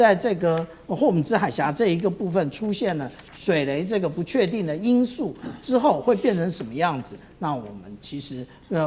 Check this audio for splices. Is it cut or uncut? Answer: uncut